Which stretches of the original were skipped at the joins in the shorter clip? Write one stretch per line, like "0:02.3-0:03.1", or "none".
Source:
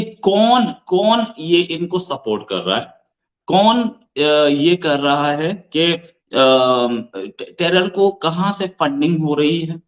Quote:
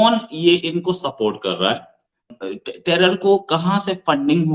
0:03.4-0:07.0